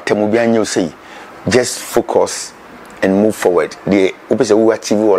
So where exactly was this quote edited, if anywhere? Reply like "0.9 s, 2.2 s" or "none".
none